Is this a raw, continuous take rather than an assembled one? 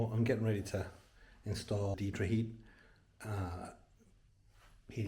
no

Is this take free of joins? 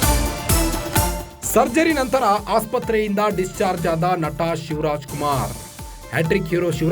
no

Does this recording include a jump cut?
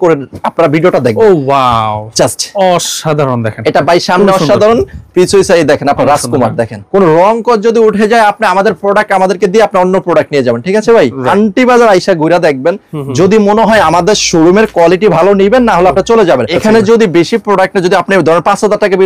yes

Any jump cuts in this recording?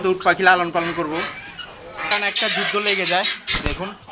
yes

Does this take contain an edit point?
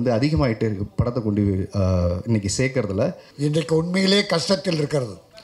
yes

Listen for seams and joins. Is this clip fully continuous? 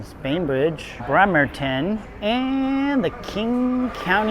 no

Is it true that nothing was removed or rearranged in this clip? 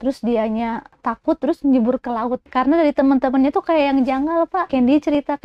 no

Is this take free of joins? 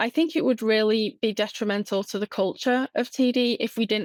yes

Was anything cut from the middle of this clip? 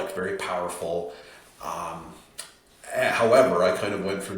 no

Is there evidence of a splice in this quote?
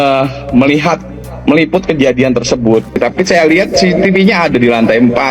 yes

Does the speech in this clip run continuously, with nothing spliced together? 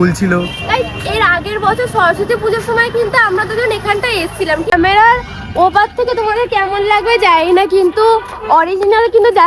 no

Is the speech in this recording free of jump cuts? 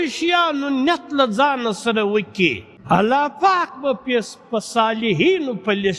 no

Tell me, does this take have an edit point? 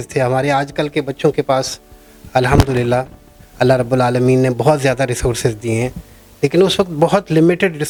no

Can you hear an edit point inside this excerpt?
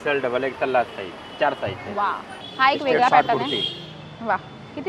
no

